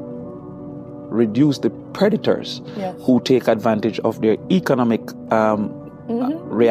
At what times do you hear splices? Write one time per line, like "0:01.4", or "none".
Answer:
0:00.9